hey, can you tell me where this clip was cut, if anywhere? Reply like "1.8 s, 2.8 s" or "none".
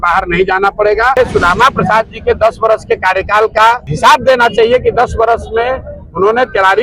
1.2 s, 3.9 s